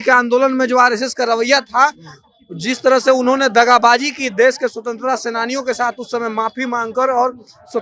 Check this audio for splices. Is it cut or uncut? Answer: uncut